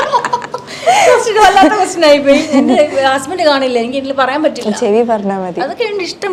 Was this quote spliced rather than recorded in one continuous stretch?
no; 0 cuts

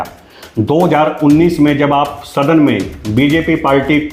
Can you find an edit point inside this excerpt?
no; 0 cuts

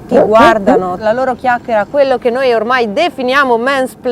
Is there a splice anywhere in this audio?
yes; 1 cut; at 1.0 s

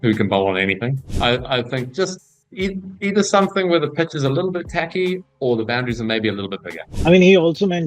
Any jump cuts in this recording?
yes; 1 cut; at 1.1 s

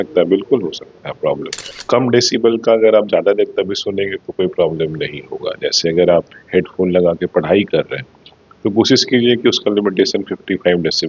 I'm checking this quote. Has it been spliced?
yes; 1 cut; at 1.7 s

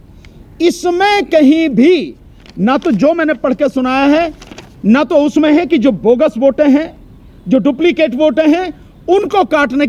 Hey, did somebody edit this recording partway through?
no; 0 cuts

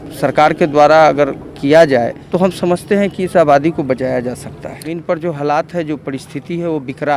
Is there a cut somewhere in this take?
yes; 2 cuts; at 2.2 s, 4.9 s

